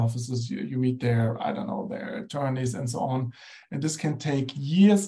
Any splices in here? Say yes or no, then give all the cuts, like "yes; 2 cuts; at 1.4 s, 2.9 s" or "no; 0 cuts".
no; 0 cuts